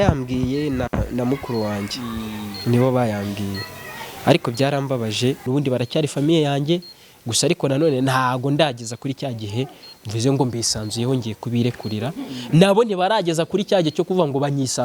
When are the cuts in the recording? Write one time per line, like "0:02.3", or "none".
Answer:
0:05.4